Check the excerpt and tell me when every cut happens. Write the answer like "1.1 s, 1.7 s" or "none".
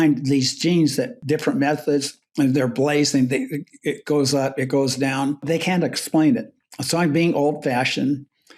1.2 s, 5.4 s